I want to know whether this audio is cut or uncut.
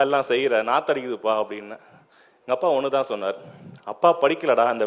uncut